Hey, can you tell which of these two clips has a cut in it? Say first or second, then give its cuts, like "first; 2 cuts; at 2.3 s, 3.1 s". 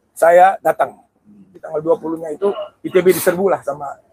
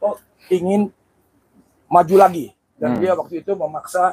first; 1 cut; at 1.7 s